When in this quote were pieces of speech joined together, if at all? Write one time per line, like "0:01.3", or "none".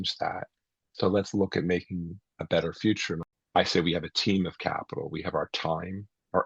0:03.3